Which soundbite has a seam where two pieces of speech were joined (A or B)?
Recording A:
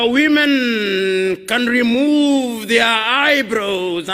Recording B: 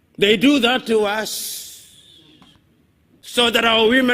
B